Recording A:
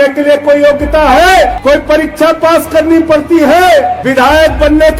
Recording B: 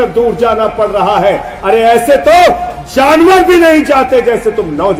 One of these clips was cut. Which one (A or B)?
A